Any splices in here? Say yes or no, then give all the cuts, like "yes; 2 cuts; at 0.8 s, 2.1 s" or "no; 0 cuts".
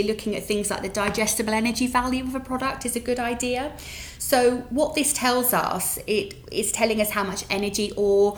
no; 0 cuts